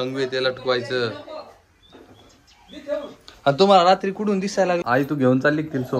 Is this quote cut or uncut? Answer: cut